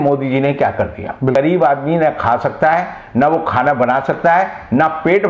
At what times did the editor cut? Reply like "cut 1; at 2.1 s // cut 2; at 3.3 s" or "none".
cut 1; at 1.3 s

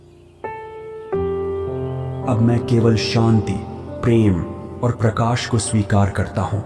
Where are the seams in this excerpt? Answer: cut 1; at 2.2 s

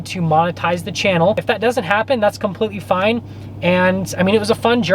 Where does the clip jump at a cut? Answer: cut 1; at 1.4 s

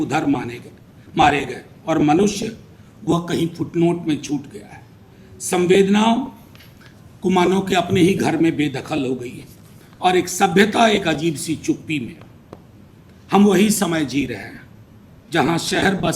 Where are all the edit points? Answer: none

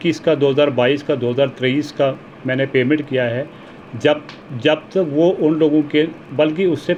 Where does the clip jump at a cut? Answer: none

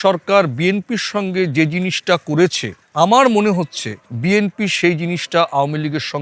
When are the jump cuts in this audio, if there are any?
none

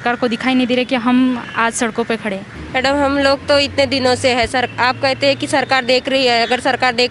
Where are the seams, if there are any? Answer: cut 1; at 2.5 s

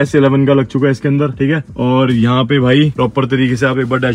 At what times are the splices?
none

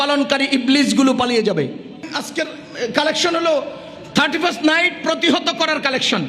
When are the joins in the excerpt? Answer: cut 1; at 2.1 s

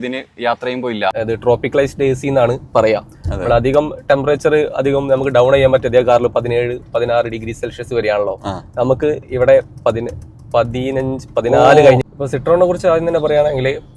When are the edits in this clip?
cut 1; at 1.1 s // cut 2; at 12.0 s

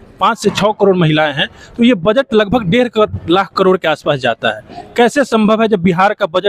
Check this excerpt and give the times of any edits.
none

